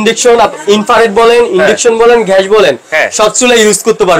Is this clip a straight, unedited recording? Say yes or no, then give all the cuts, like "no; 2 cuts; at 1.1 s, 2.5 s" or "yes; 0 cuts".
yes; 0 cuts